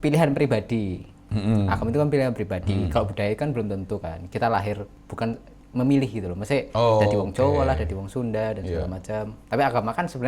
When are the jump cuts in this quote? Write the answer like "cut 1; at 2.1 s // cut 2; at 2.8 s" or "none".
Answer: cut 1; at 5.1 s